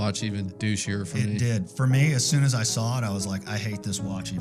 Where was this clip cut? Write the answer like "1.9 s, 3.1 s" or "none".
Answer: none